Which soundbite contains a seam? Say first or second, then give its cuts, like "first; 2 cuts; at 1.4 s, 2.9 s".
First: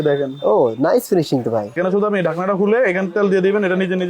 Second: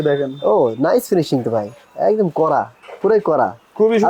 first; 1 cut; at 1.8 s